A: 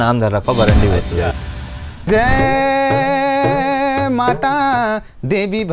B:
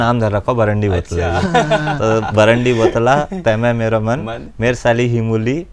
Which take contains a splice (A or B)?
A